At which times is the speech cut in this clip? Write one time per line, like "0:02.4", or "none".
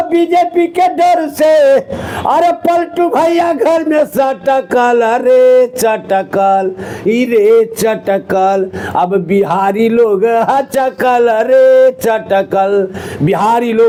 none